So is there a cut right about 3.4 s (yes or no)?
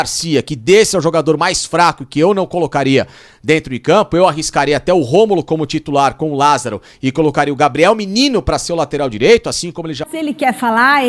no